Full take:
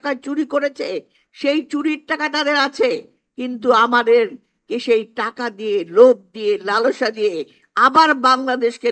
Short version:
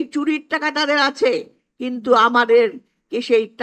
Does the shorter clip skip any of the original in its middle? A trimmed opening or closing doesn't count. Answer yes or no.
no